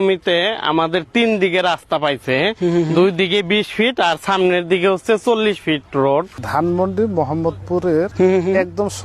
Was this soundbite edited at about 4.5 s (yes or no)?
no